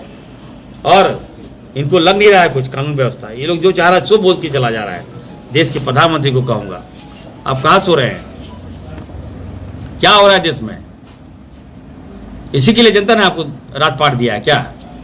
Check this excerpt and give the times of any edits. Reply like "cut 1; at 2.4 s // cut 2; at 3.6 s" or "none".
none